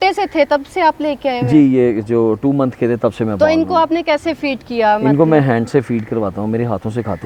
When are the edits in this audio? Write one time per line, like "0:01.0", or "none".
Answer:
none